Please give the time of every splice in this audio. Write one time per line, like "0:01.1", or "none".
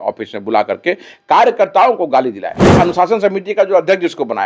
0:02.7